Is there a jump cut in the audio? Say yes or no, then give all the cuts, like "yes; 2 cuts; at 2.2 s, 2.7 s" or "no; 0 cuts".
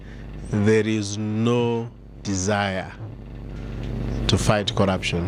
no; 0 cuts